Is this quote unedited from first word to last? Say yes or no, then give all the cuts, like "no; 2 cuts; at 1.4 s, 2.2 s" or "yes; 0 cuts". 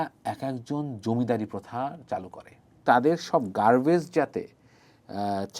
no; 1 cut; at 2.8 s